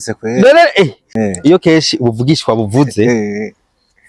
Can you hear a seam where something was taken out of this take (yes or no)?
yes